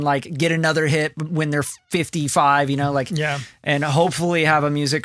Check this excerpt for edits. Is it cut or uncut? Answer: uncut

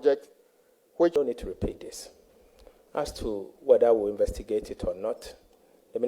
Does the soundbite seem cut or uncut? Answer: cut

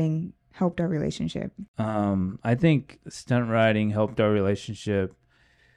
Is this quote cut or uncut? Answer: uncut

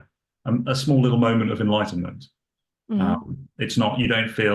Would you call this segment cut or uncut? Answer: uncut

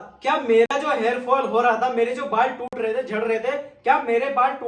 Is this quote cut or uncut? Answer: uncut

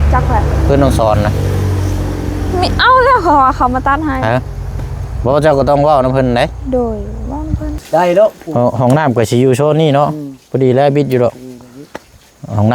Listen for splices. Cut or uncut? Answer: cut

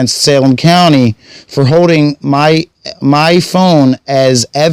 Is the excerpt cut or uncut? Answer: uncut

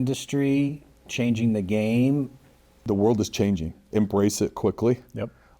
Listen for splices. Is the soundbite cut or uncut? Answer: cut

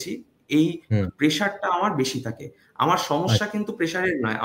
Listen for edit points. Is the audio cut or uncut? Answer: uncut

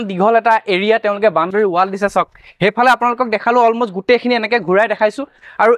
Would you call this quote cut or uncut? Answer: uncut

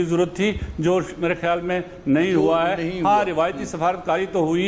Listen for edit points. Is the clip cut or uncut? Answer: uncut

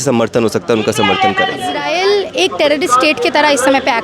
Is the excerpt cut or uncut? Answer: cut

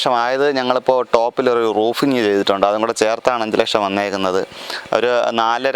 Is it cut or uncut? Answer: uncut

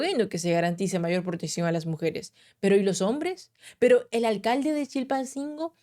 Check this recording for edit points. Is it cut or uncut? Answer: uncut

